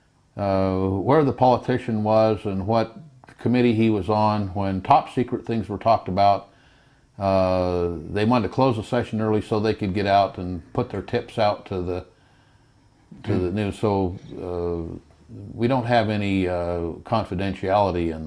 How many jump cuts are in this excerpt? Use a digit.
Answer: 0